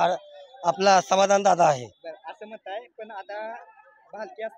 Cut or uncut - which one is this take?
uncut